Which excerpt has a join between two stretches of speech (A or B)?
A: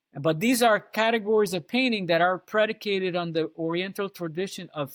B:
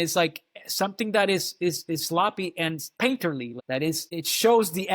B